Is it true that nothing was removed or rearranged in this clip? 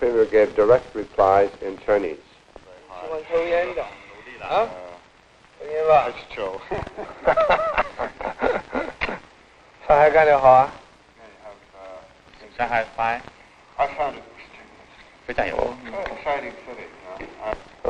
no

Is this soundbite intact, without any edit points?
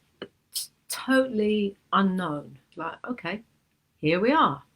no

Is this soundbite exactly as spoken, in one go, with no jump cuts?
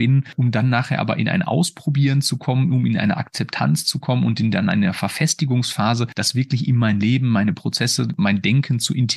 no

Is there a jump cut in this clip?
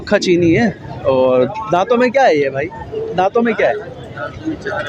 no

